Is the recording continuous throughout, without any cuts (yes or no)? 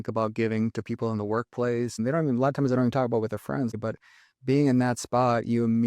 no